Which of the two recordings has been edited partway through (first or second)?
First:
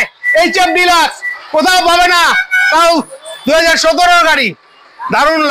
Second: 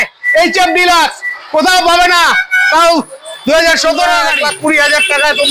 second